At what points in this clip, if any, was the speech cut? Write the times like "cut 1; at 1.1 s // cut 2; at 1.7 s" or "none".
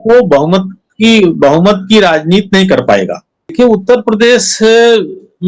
cut 1; at 3.5 s